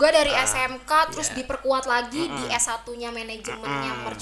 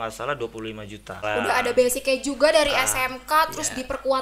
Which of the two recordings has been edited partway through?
second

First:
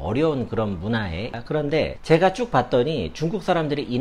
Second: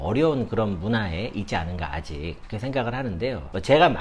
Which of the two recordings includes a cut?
first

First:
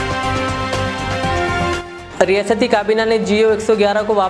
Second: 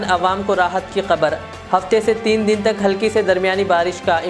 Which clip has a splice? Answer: first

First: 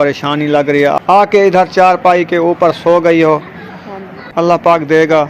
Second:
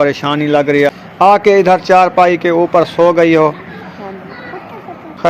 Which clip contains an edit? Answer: first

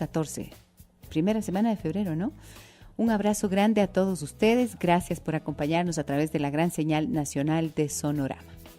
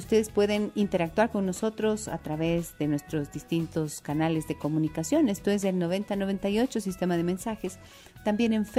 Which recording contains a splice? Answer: first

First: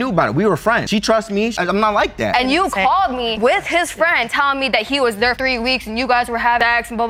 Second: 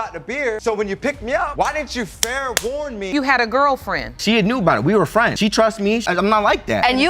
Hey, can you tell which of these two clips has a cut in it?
second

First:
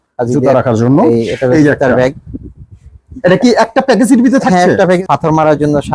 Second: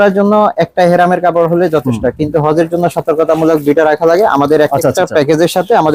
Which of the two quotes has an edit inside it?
first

